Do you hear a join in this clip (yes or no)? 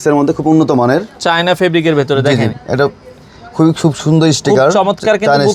no